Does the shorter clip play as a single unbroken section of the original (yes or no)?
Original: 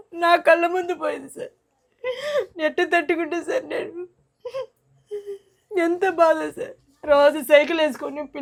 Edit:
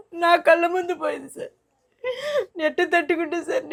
yes